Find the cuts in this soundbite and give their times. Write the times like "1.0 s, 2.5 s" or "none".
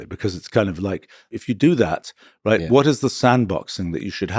1.2 s